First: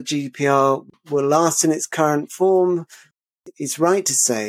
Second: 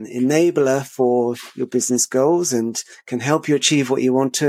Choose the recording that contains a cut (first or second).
first